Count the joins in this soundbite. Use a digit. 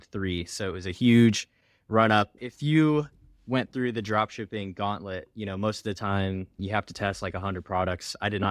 2